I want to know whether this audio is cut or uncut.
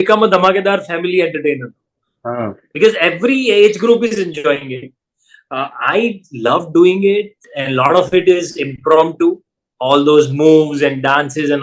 uncut